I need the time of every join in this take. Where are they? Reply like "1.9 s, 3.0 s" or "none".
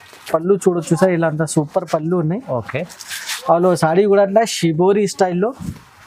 none